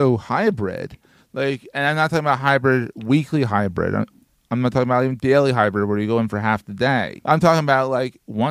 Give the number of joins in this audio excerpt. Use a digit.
1